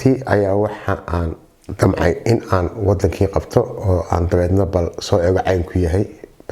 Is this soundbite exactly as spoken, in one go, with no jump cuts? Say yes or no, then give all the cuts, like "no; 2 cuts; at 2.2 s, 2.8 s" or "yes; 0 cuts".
yes; 0 cuts